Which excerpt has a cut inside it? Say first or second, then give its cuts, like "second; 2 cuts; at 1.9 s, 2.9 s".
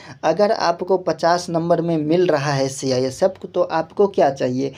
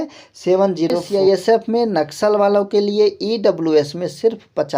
second; 1 cut; at 1.0 s